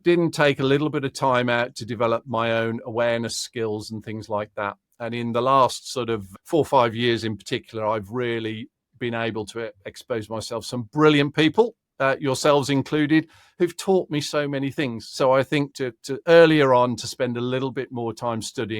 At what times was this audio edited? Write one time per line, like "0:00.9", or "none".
0:06.2
0:15.7